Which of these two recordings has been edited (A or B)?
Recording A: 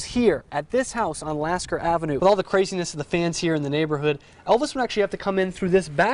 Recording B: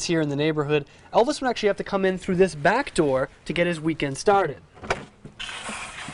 A